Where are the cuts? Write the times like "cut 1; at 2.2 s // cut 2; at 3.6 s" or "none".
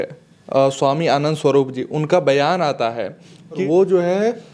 none